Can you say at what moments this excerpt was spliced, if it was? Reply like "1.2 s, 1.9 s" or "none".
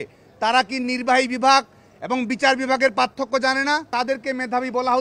3.9 s